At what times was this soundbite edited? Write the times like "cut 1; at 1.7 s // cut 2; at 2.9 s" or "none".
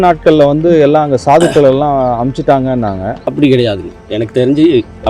cut 1; at 3.2 s